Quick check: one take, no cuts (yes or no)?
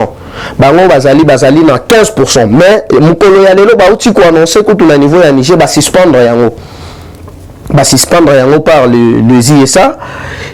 yes